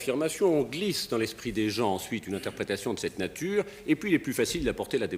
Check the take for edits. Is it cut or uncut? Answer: uncut